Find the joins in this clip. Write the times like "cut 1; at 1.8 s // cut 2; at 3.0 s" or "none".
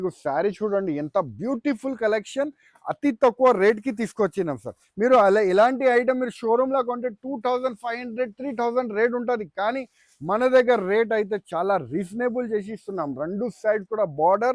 none